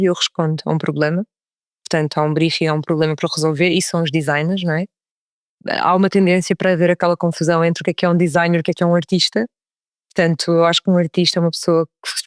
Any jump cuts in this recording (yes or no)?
yes